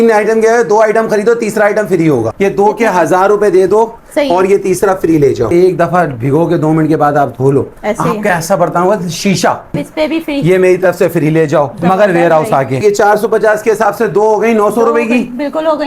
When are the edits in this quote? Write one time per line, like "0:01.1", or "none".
0:02.3
0:05.5
0:09.7
0:12.8